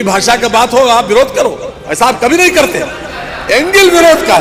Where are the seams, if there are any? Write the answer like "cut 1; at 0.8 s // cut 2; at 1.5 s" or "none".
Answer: none

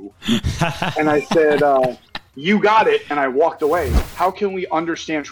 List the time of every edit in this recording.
cut 1; at 4.0 s

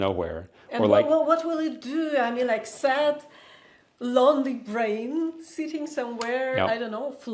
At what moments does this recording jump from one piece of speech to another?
none

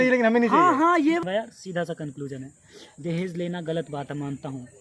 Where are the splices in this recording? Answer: cut 1; at 1.2 s

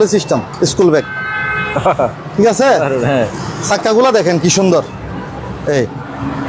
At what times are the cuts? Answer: cut 1; at 5.6 s

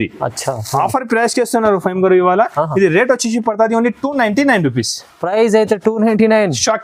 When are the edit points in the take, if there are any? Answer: none

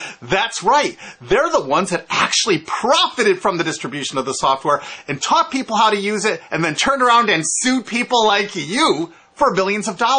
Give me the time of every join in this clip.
cut 1; at 4.5 s

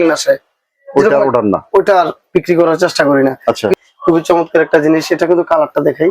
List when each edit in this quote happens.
cut 1; at 3.8 s

